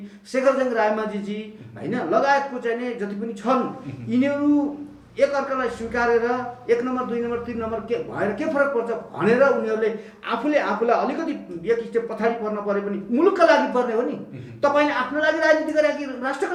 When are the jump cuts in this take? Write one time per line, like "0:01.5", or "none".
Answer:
none